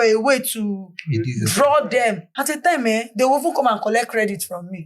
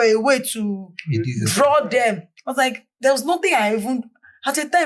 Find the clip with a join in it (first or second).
first